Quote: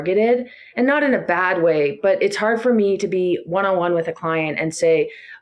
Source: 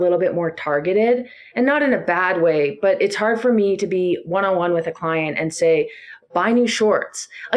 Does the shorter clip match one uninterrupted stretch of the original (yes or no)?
yes